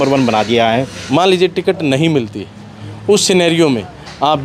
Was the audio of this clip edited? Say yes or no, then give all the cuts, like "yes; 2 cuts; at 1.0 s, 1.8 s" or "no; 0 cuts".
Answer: yes; 1 cut; at 1.0 s